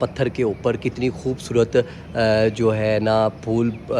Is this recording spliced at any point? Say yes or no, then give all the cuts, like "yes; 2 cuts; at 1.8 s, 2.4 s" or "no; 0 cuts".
no; 0 cuts